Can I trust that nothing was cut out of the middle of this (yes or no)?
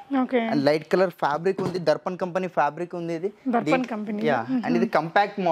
yes